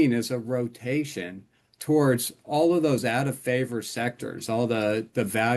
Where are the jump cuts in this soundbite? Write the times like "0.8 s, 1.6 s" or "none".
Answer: none